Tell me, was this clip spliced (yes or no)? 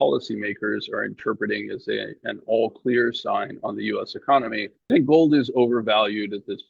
yes